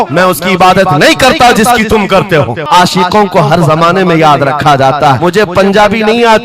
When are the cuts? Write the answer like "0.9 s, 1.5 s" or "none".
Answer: 2.6 s, 5.2 s